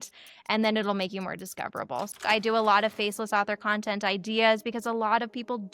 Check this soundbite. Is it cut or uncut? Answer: cut